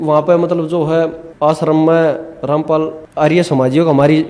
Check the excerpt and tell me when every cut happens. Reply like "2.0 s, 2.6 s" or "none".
1.2 s, 3.0 s